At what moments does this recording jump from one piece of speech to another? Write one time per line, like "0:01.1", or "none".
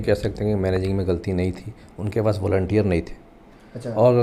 none